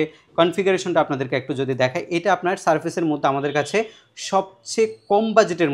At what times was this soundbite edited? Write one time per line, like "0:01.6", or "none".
none